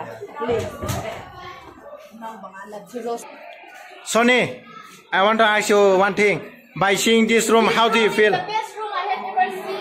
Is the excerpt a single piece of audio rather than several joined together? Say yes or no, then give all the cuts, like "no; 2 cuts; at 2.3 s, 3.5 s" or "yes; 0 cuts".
no; 1 cut; at 3.3 s